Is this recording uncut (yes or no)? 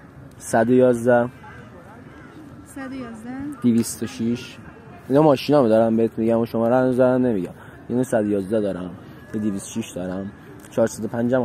yes